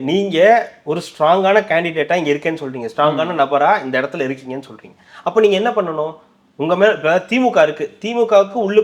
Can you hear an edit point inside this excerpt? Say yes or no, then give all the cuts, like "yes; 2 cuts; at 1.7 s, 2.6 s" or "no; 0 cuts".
no; 0 cuts